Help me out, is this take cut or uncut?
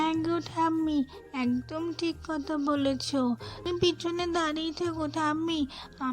cut